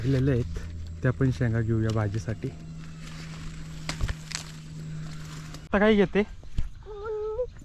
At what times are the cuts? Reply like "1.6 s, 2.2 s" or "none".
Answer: 5.7 s